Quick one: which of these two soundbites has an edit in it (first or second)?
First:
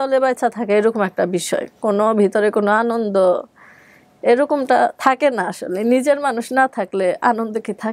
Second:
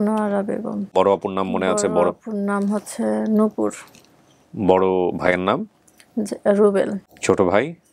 second